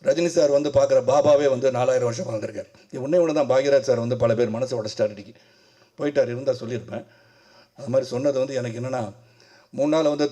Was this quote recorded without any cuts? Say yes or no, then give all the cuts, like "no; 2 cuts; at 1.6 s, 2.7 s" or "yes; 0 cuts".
yes; 0 cuts